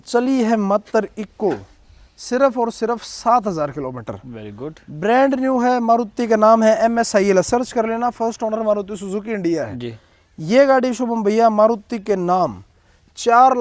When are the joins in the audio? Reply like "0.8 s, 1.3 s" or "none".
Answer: none